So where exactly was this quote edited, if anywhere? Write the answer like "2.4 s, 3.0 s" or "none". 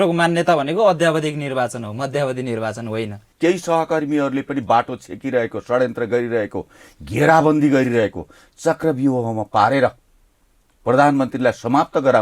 3.2 s